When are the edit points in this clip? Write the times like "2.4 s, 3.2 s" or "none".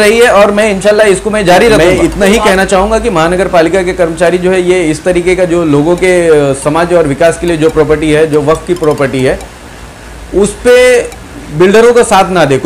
1.8 s